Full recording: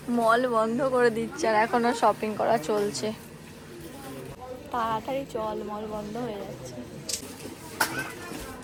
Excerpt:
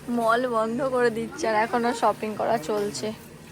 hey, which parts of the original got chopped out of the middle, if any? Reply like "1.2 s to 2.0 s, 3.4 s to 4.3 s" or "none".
none